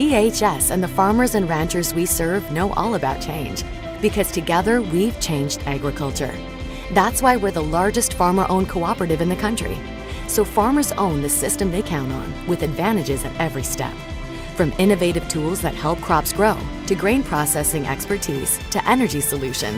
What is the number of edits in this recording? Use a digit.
0